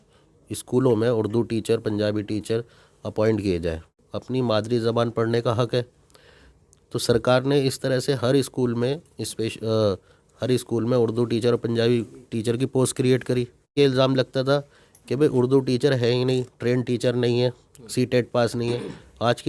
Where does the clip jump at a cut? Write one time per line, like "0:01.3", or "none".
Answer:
0:04.1
0:13.7